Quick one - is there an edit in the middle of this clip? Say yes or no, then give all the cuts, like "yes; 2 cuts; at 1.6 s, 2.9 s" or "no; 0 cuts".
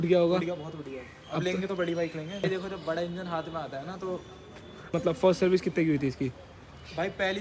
yes; 2 cuts; at 2.5 s, 5.0 s